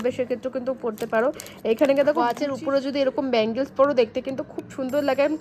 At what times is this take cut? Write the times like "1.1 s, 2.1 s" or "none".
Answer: 2.4 s